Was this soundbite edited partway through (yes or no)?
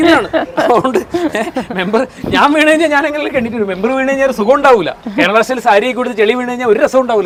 no